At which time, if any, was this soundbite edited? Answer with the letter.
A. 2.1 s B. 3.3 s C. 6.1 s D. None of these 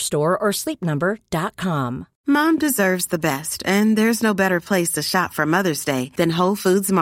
A